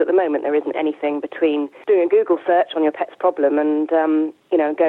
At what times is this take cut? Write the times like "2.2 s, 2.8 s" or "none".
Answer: 1.7 s